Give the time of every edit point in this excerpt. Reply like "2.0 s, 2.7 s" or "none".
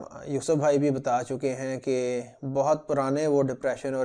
none